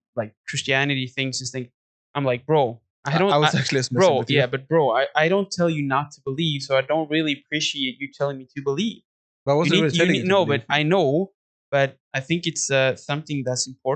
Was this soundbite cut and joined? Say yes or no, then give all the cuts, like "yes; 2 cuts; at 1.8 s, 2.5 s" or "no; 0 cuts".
no; 0 cuts